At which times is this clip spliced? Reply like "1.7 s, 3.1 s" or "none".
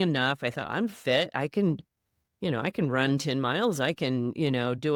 none